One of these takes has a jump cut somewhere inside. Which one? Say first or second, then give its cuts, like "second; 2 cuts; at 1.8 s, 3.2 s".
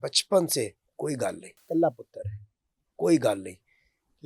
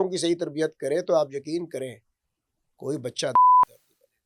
first; 1 cut; at 1.5 s